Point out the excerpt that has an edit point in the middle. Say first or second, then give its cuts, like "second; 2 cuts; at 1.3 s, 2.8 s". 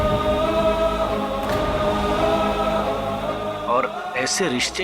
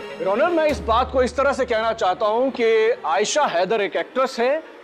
first; 1 cut; at 1.8 s